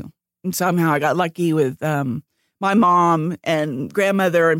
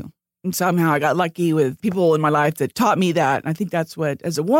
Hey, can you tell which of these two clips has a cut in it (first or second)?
second